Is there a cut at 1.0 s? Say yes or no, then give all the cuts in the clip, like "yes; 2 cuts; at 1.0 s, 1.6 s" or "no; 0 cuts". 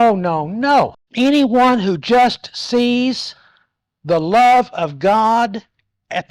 yes; 1 cut; at 1.0 s